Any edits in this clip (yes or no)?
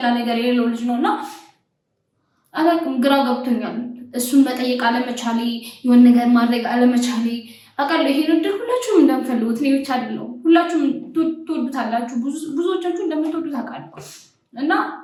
no